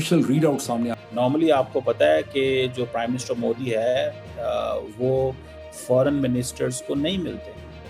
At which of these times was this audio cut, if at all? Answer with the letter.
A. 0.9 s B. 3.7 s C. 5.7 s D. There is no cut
A